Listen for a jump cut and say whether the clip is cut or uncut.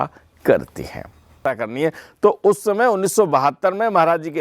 cut